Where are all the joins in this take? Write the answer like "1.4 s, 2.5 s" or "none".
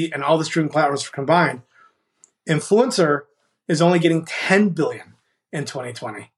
none